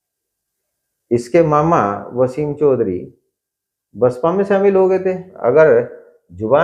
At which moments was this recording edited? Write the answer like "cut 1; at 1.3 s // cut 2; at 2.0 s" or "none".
cut 1; at 5.3 s